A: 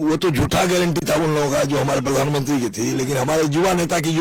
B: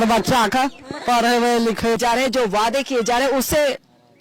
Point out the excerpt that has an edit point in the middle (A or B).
B